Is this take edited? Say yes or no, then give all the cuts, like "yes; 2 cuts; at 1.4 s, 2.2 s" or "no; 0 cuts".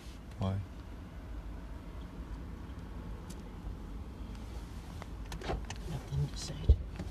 no; 0 cuts